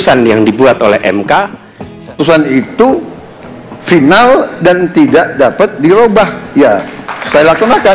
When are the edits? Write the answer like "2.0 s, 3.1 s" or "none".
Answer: 2.1 s